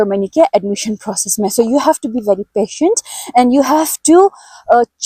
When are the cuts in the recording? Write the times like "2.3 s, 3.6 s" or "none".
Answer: none